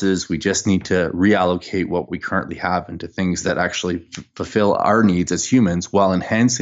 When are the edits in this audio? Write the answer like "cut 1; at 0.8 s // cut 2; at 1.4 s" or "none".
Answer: none